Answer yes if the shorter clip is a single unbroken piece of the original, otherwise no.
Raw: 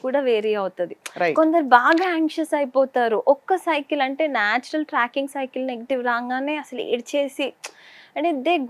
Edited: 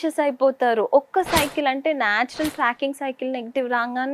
yes